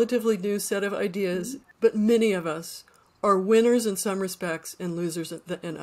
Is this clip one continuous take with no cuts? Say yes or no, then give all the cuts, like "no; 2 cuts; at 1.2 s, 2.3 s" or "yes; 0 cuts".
no; 1 cut; at 1.6 s